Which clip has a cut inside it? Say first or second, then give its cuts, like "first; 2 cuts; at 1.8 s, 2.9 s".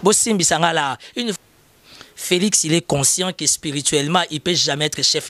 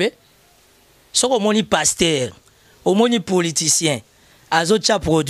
first; 1 cut; at 1.4 s